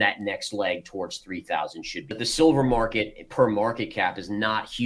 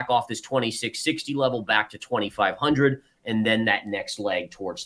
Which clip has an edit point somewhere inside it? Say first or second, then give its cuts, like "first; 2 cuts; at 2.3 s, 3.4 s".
first; 1 cut; at 2.2 s